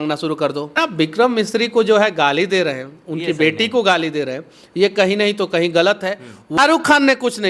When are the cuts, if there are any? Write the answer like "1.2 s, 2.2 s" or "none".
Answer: 0.8 s, 6.6 s